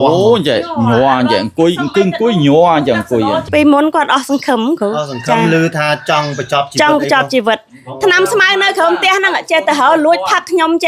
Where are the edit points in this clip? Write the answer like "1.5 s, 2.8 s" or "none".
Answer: 3.4 s